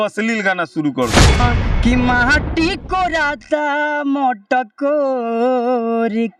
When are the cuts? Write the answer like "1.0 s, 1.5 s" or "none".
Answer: 1.4 s